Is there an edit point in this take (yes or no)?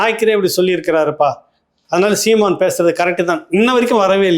no